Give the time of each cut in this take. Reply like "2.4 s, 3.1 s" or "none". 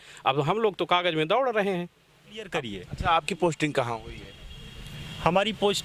2.5 s